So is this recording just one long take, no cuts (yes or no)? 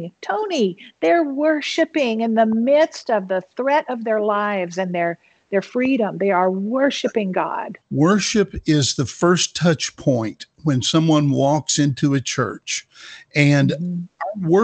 no